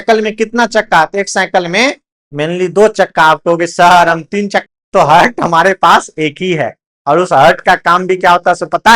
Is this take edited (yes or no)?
yes